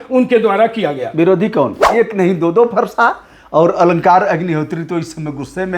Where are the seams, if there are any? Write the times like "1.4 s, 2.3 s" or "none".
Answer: 1.8 s